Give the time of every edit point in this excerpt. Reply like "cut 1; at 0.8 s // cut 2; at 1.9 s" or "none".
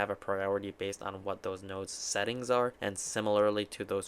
cut 1; at 2.8 s